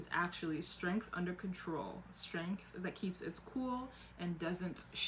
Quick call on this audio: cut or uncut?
uncut